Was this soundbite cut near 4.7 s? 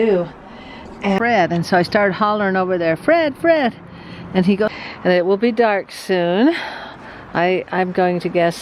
yes; 2 cuts; at 1.2 s, 4.7 s

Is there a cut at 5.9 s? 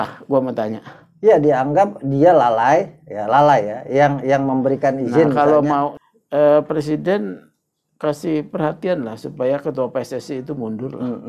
yes; 1 cut; at 5.9 s

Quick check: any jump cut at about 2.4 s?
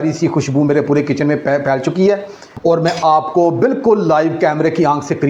yes; 1 cut; at 2.4 s

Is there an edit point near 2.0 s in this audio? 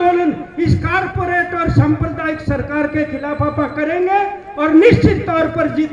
no; 0 cuts

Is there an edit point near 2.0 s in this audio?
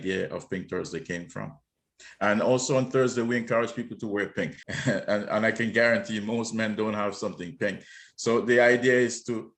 no; 1 cut; at 4.6 s

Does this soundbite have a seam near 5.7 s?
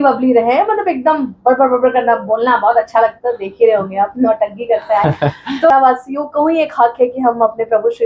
yes; 1 cut; at 5.7 s

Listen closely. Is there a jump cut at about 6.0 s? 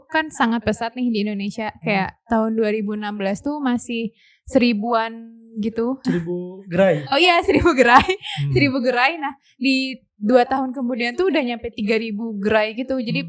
yes; 1 cut; at 6.0 s

